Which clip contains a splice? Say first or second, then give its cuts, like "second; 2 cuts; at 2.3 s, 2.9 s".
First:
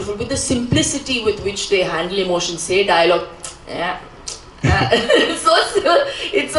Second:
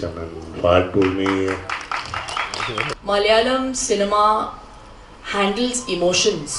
second; 1 cut; at 2.9 s